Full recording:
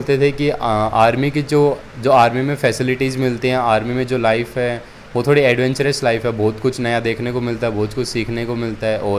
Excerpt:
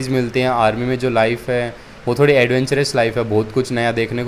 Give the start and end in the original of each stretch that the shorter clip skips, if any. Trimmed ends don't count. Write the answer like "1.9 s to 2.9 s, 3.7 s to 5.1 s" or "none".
none